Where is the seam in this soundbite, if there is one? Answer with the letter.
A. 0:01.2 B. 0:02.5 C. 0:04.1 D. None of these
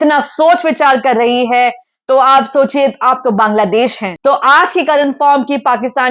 C